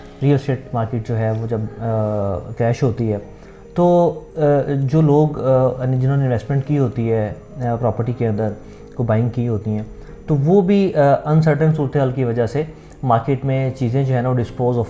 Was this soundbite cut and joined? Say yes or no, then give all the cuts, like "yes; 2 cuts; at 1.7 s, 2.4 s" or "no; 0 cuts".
no; 0 cuts